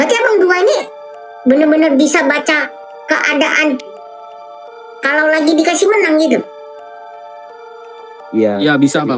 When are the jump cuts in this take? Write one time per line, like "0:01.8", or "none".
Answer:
0:06.5
0:08.2